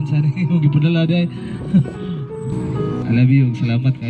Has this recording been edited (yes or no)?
yes